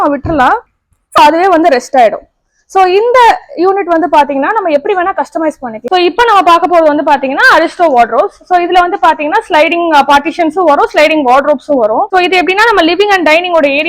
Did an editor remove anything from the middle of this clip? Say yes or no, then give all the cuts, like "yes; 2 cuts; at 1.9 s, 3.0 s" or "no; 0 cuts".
yes; 3 cuts; at 1.2 s, 5.8 s, 12.1 s